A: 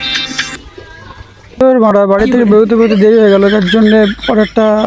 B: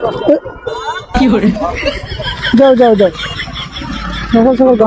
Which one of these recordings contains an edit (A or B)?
A